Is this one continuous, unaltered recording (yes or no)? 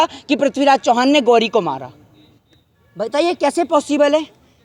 yes